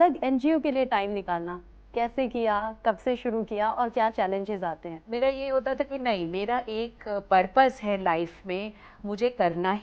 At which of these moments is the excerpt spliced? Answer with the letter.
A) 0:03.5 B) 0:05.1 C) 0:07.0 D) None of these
B